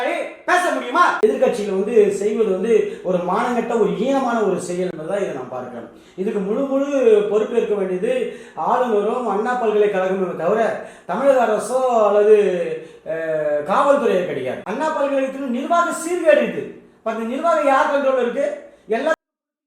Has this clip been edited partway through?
yes; 2 cuts; at 1.2 s, 14.6 s

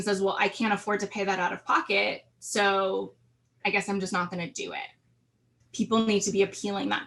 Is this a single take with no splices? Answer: no; 1 cut; at 5.6 s

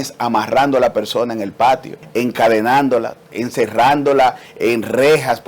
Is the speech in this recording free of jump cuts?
no; 1 cut; at 2.0 s

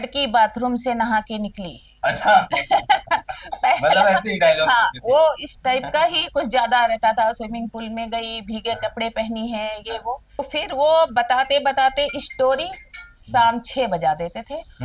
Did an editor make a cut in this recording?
yes; 1 cut; at 10.4 s

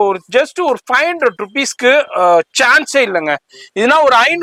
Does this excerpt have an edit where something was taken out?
no; 0 cuts

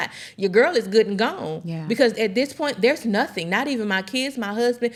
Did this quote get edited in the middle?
no; 0 cuts

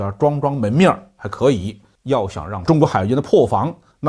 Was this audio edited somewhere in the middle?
yes; 1 cut; at 2.6 s

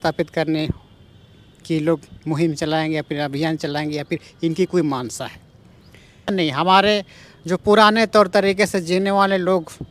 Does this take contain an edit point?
yes; 1 cut; at 6.3 s

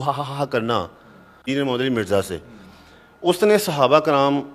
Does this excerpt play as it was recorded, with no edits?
no; 1 cut; at 1.3 s

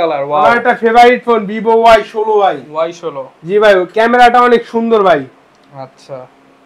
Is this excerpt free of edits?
yes; 0 cuts

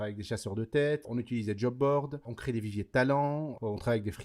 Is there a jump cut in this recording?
yes; 2 cuts; at 1.1 s, 2.3 s

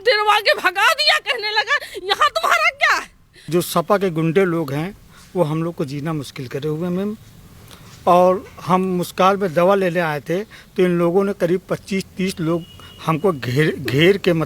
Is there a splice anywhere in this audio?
yes; 1 cut; at 3.5 s

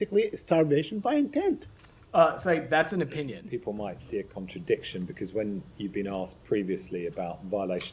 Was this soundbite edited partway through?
yes; 1 cut; at 3.4 s

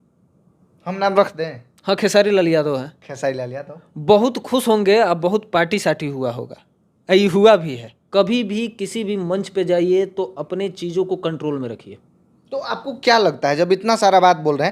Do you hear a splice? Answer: yes; 1 cut; at 8.0 s

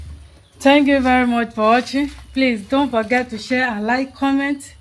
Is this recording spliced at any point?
no; 0 cuts

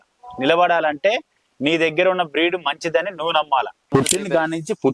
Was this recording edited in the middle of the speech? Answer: yes; 1 cut; at 3.9 s

